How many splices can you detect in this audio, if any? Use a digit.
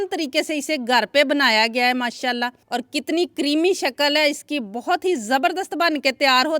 1